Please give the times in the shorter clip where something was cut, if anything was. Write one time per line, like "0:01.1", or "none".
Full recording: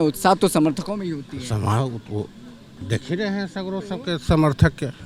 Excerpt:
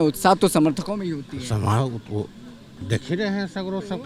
none